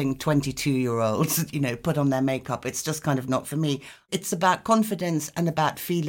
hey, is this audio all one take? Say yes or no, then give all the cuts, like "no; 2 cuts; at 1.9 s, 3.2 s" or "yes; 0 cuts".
no; 1 cut; at 4.0 s